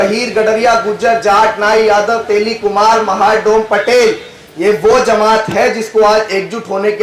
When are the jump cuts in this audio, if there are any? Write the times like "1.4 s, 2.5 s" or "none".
none